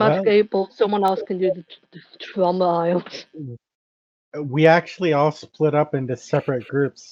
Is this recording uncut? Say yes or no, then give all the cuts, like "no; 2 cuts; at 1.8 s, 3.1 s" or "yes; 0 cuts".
yes; 0 cuts